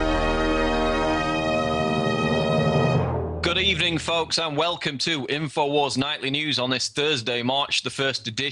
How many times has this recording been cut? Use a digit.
0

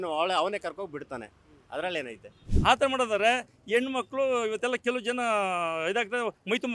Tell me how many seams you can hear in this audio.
1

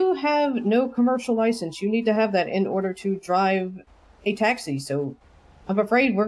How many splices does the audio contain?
0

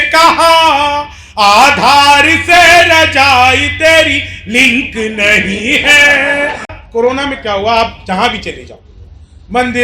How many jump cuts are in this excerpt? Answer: 1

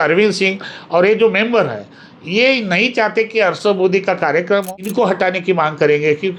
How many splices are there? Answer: 1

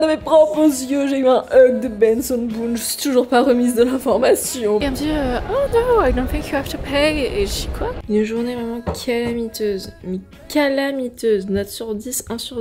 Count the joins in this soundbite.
2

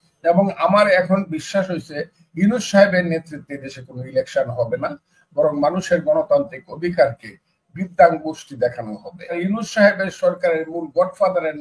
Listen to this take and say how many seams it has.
1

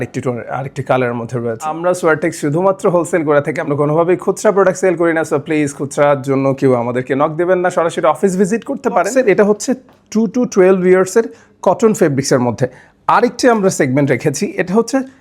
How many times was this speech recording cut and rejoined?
2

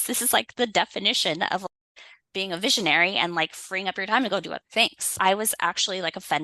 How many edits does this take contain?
1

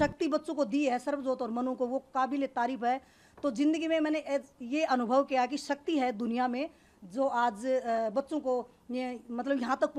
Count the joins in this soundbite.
0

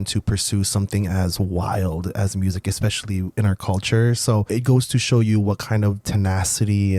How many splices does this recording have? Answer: 2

